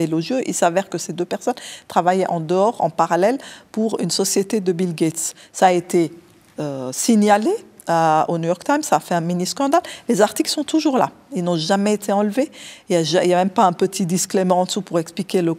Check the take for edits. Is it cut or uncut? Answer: uncut